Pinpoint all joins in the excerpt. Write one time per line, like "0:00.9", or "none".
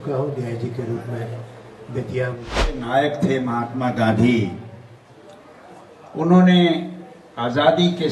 0:02.7